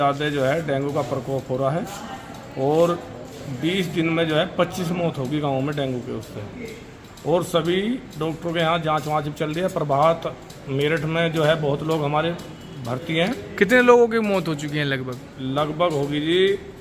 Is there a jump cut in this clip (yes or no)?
no